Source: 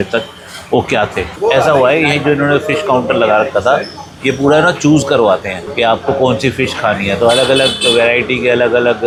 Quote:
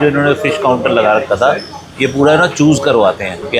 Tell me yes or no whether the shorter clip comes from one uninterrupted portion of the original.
yes